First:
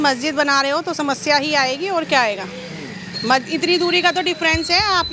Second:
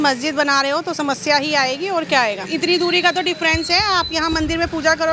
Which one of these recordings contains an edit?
second; 1 cut; at 2.5 s

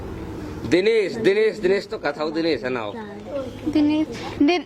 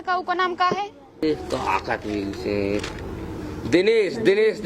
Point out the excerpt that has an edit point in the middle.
second; 1 cut; at 1.2 s

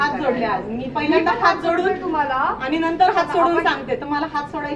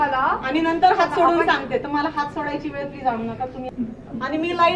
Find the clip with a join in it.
second; 1 cut; at 3.7 s

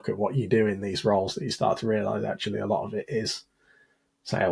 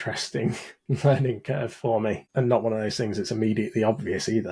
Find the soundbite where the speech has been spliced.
second; 1 cut; at 2.2 s

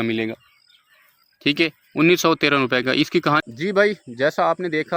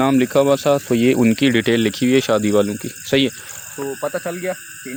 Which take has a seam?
first; 1 cut; at 3.4 s

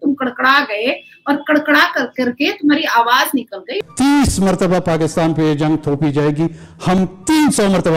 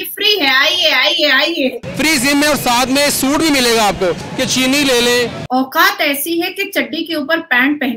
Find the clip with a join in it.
second; 1 cut; at 5.4 s

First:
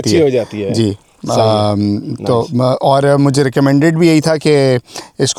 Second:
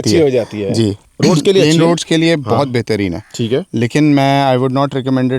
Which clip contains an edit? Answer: second; 1 cut; at 1.1 s

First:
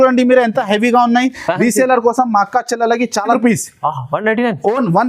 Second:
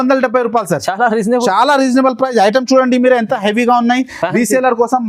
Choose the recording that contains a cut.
first; 1 cut; at 3.3 s

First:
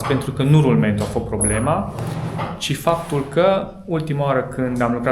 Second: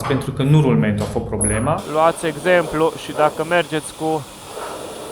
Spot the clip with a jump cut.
second; 1 cut; at 1.8 s

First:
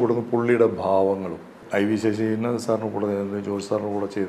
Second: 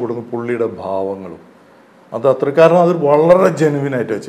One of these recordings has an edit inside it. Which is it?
first; 1 cut; at 1.6 s

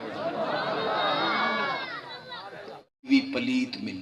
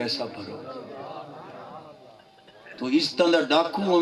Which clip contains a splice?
first; 1 cut; at 3.1 s

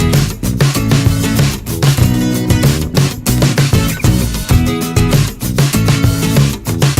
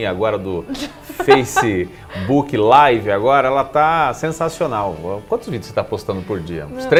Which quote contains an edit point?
first; 1 cut; at 4.5 s

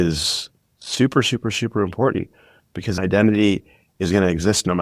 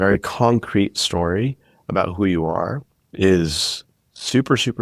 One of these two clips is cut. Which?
first; 1 cut; at 3.0 s

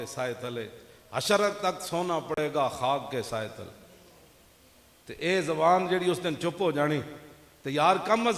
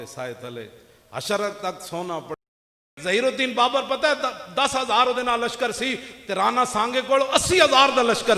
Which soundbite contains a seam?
second; 1 cut; at 2.7 s

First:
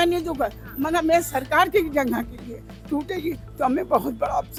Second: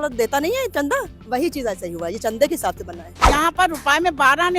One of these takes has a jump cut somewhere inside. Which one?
second; 1 cut; at 3.2 s

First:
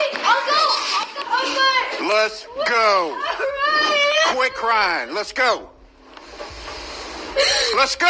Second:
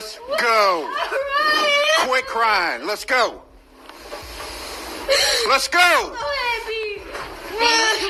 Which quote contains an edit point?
first; 1 cut; at 1.1 s

